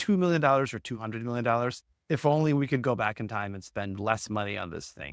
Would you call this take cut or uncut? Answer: uncut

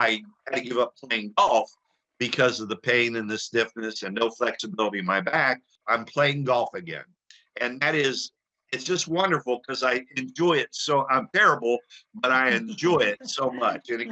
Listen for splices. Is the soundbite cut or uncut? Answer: cut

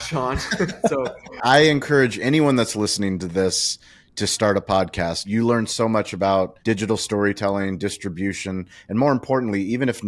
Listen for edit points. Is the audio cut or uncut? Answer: cut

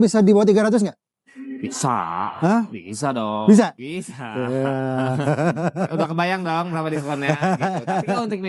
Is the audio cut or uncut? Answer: uncut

